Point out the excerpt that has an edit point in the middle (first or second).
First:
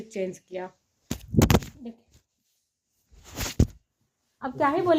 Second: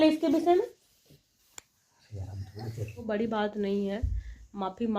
second